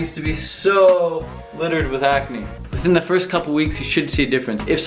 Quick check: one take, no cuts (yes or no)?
no